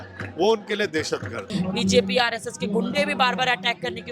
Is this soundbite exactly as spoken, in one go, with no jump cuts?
no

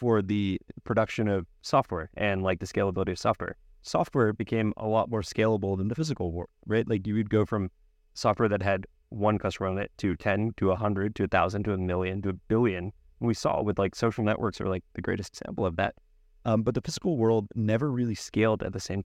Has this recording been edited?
yes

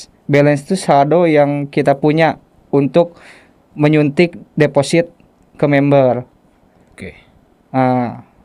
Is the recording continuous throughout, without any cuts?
yes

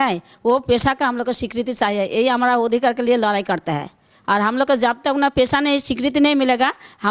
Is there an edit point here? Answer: no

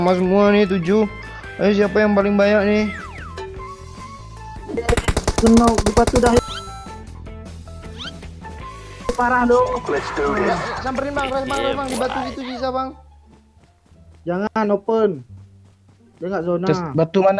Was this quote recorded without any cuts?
no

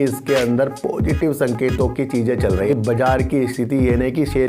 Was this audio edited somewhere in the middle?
yes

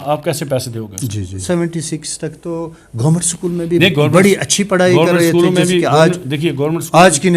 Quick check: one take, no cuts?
no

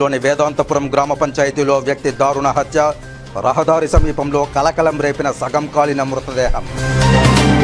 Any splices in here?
no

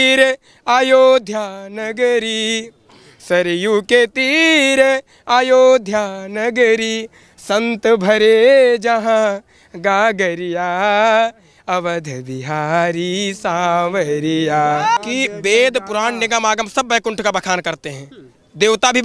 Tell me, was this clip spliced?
yes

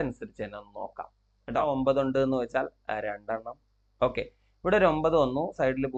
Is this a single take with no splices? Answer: no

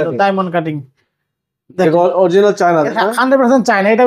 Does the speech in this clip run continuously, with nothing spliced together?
yes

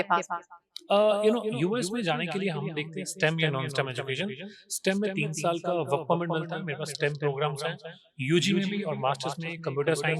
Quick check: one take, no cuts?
yes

